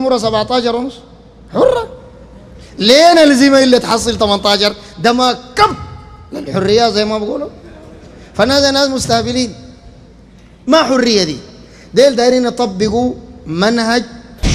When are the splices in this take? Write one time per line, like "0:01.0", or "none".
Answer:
none